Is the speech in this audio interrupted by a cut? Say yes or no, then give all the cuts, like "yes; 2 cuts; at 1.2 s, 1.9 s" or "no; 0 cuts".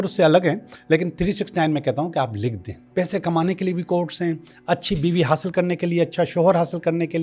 yes; 1 cut; at 2.8 s